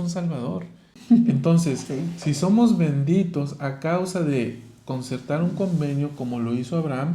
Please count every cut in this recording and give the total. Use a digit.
1